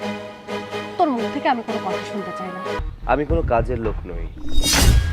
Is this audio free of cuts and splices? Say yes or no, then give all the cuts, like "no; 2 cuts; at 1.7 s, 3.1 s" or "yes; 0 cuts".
no; 1 cut; at 2.8 s